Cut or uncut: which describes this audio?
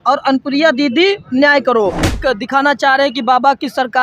cut